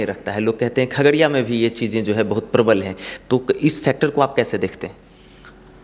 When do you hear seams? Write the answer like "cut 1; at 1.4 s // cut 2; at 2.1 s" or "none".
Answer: none

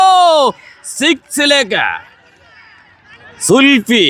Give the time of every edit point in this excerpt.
none

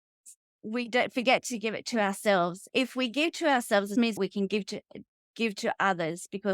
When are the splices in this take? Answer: cut 1; at 2.6 s // cut 2; at 4.1 s

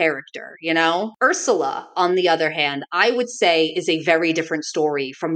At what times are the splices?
cut 1; at 1.1 s

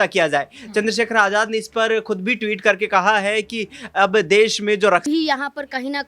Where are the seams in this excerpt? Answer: cut 1; at 5.0 s

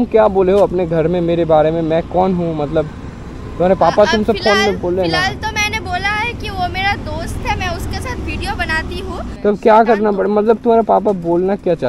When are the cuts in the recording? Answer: cut 1; at 9.3 s

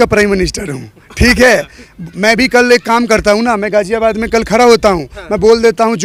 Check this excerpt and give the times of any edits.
none

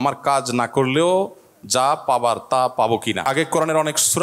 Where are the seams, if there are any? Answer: cut 1; at 3.2 s

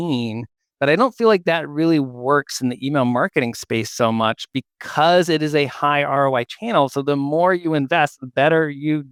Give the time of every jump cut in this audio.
none

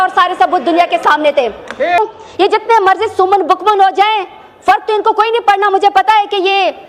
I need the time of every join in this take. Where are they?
cut 1; at 2.0 s

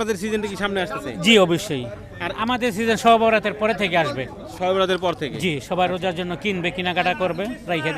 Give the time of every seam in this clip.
none

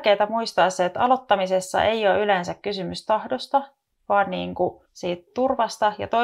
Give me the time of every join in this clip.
cut 1; at 4.9 s

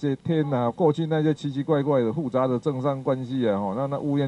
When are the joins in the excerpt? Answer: none

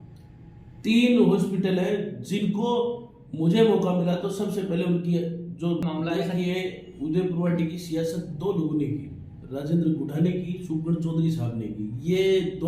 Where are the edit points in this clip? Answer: cut 1; at 5.8 s

